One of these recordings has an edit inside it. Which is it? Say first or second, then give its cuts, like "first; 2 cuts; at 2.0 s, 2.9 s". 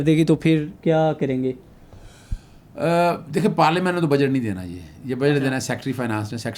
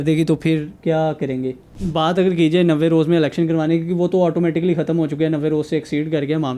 second; 1 cut; at 1.8 s